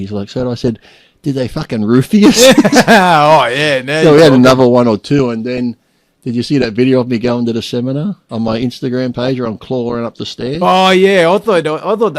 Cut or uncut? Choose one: cut